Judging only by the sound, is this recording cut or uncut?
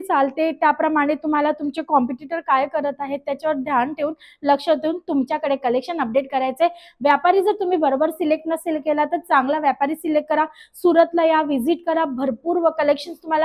uncut